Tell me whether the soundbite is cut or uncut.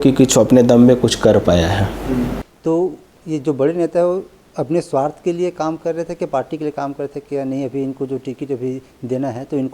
cut